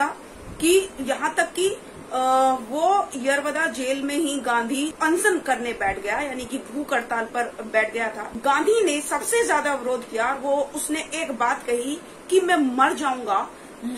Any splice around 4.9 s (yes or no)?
yes